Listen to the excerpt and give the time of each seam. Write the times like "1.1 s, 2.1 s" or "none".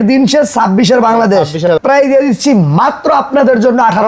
1.7 s